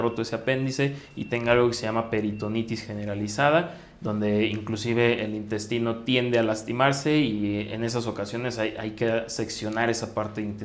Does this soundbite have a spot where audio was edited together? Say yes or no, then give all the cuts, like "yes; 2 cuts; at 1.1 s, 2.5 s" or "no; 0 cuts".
no; 0 cuts